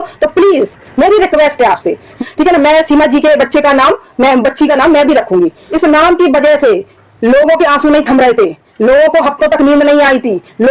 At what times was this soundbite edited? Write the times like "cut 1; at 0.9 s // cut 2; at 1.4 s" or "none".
cut 1; at 2.1 s // cut 2; at 5.6 s